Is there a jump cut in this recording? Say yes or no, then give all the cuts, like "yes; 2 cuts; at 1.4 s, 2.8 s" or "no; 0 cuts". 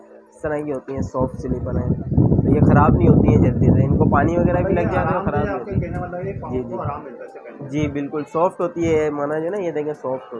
no; 0 cuts